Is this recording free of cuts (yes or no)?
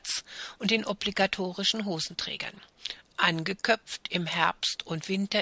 no